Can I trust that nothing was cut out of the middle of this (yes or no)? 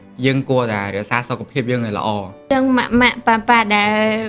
no